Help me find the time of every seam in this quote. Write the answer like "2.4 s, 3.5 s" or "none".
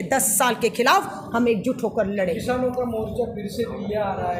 none